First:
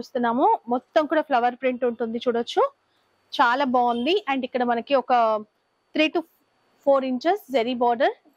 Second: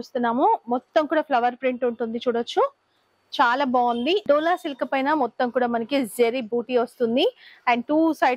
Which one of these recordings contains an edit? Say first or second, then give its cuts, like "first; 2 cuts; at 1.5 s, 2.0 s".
second; 1 cut; at 4.2 s